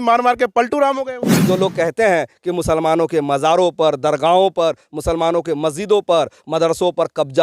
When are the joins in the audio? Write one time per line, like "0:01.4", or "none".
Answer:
0:01.3